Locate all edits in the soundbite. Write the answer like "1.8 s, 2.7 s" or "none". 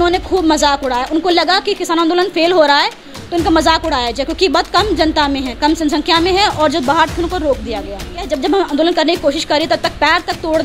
8.3 s